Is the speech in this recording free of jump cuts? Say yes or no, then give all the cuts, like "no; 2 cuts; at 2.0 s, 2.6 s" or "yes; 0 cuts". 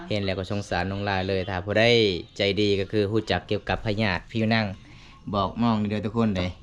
yes; 0 cuts